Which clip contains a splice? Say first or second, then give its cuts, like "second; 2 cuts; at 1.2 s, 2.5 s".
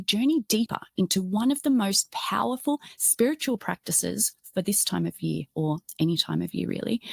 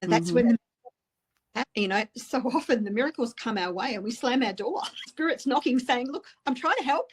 second; 2 cuts; at 1.6 s, 5.1 s